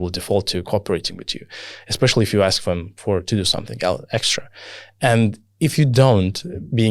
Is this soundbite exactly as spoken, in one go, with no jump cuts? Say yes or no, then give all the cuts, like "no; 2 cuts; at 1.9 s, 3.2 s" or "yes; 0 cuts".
yes; 0 cuts